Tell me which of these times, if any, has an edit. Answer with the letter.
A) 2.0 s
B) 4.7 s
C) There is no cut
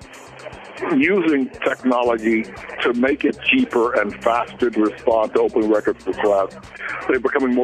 B